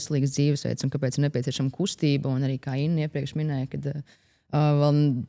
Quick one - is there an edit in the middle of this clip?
no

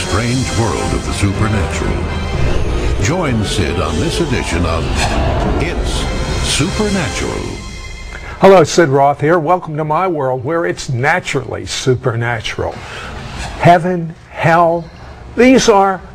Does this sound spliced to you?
yes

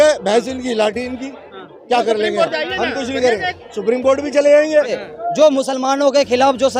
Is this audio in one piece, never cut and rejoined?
no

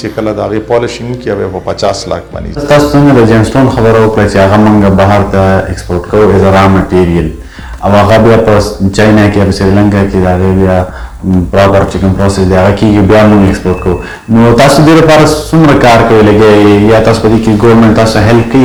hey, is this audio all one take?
yes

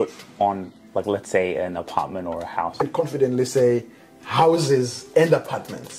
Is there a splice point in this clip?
no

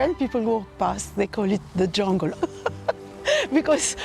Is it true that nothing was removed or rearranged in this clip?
no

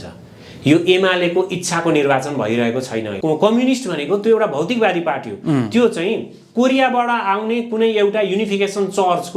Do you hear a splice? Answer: yes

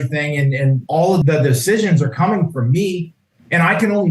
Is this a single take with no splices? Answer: no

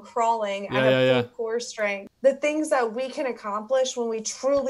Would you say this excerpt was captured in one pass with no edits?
no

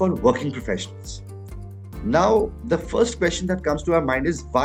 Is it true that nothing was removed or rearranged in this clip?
yes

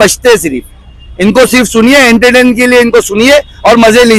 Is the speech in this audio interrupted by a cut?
no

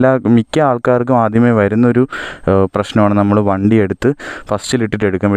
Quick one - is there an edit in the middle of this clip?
no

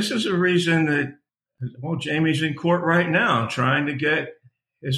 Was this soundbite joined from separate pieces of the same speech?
yes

